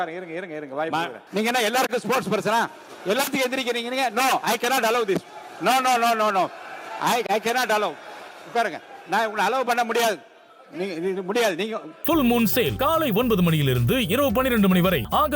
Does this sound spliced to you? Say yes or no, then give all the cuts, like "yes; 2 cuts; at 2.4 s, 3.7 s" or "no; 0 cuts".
yes; 2 cuts; at 1.2 s, 11.9 s